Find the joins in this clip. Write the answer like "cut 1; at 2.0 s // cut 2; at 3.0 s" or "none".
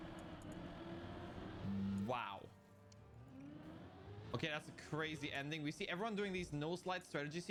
none